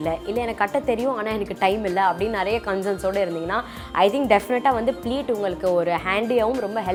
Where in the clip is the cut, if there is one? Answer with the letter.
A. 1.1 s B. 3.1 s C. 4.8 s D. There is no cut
D